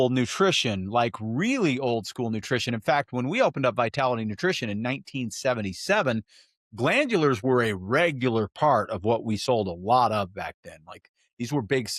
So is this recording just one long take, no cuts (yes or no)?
yes